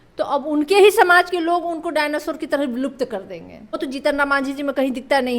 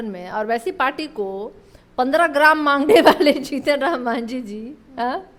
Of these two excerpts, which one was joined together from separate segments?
first; 1 cut; at 3.8 s

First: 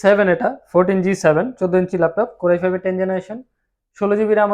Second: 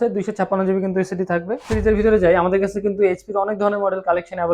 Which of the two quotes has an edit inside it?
second; 1 cut; at 1.7 s

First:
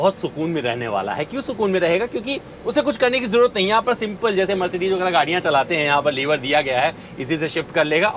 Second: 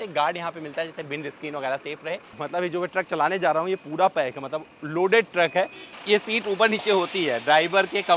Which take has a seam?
second; 2 cuts; at 2.3 s, 5.9 s

